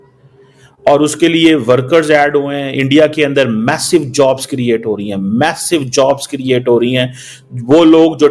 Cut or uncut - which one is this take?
uncut